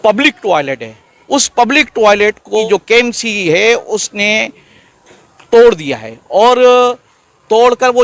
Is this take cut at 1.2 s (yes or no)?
no